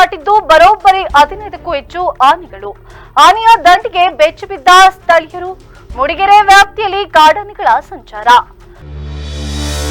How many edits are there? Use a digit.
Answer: 0